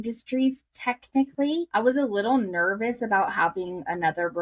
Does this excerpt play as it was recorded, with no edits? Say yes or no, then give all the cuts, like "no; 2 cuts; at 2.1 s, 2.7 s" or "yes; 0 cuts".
no; 1 cut; at 1.7 s